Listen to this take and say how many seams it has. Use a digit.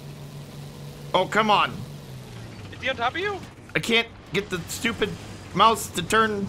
1